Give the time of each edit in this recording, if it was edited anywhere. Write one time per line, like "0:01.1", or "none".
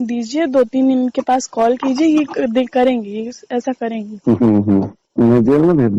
0:05.0